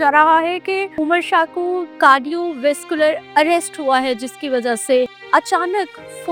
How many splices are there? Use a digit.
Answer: 4